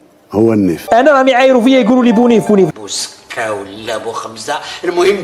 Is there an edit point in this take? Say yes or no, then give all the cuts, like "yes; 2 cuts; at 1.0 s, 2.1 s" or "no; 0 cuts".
no; 0 cuts